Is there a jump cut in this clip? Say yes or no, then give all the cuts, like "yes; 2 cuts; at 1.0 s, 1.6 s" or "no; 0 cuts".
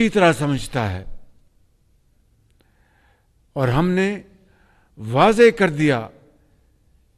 no; 0 cuts